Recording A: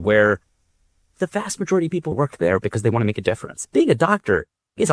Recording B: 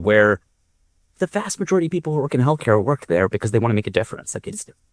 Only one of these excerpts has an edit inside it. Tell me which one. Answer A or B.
A